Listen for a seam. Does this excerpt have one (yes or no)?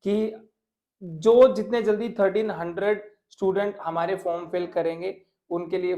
no